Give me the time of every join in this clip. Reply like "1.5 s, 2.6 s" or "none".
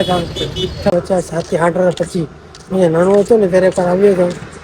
0.9 s